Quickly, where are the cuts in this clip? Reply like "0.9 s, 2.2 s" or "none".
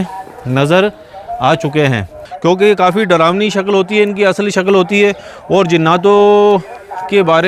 2.2 s